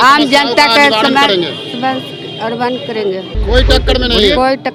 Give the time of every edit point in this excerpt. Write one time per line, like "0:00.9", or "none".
none